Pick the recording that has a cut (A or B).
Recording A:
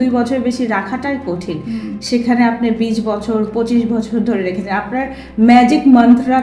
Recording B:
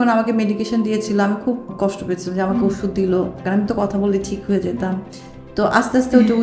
B